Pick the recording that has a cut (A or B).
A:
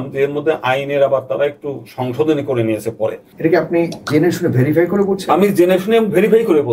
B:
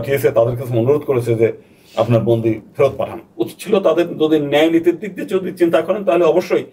A